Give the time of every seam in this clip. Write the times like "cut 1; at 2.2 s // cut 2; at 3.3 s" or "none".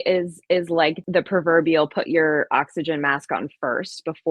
cut 1; at 1.0 s